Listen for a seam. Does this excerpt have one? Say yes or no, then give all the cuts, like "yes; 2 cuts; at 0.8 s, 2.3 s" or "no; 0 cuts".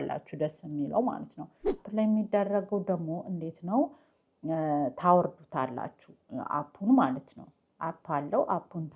yes; 1 cut; at 1.8 s